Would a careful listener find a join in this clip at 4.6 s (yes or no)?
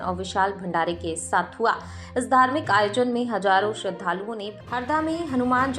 yes